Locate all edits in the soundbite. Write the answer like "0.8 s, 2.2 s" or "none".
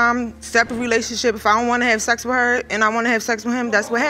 none